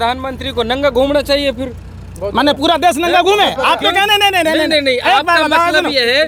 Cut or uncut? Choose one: uncut